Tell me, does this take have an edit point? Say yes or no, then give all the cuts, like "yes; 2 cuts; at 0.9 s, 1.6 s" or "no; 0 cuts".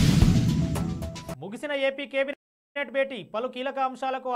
no; 0 cuts